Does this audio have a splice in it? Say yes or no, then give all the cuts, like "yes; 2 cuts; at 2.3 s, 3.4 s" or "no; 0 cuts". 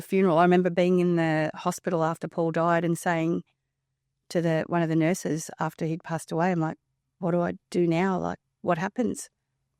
no; 0 cuts